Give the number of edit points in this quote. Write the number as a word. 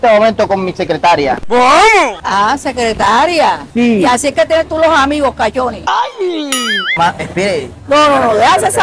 one